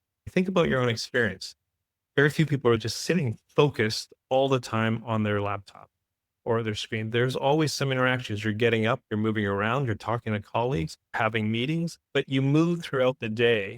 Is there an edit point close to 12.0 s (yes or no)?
yes